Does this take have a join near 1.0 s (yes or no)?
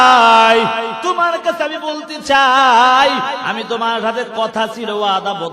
yes